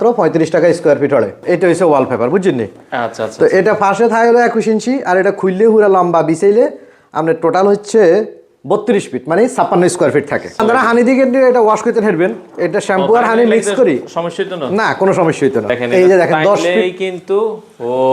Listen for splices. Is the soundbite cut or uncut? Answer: cut